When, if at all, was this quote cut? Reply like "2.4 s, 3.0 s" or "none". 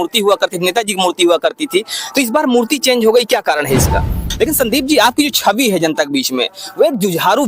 4.2 s